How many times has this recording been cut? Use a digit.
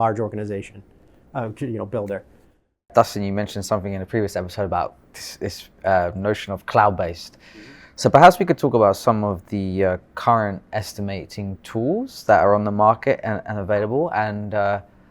1